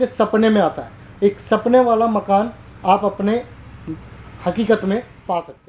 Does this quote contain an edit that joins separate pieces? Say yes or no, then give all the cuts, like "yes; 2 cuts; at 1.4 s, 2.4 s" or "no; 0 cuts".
no; 0 cuts